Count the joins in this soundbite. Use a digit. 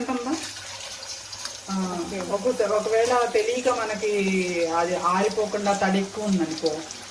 0